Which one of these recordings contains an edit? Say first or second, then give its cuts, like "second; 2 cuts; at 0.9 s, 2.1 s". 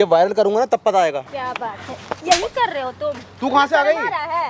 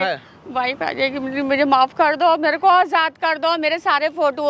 first; 1 cut; at 1.3 s